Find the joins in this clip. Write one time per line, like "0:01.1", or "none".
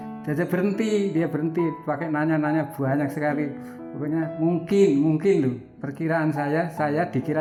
none

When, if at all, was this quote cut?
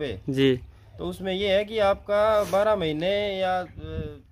none

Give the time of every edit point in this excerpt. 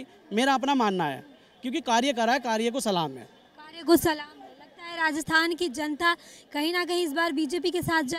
none

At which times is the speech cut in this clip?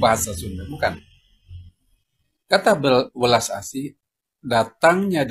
none

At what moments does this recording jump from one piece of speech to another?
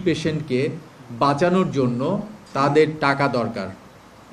none

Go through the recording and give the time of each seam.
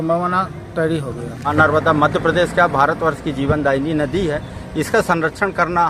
0:01.5

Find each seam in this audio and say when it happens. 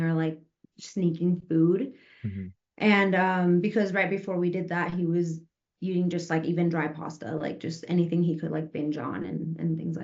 none

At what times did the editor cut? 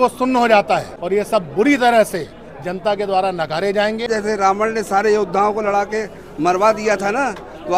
0:00.9
0:04.1

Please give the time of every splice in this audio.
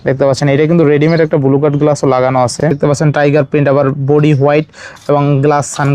0:02.7

